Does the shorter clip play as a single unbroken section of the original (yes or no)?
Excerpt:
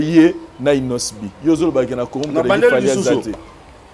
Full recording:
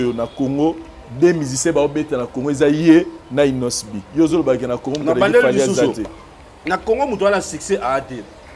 yes